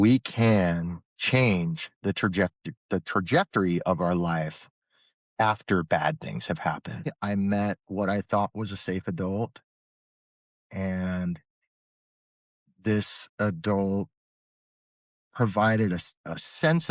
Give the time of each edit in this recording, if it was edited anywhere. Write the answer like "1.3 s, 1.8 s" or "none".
7.2 s